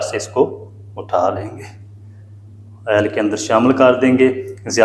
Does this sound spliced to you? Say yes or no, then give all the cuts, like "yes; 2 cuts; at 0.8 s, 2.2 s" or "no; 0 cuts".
no; 0 cuts